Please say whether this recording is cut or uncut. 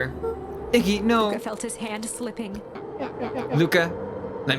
cut